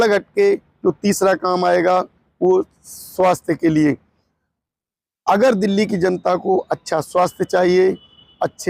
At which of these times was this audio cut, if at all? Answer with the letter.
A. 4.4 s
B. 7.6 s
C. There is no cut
C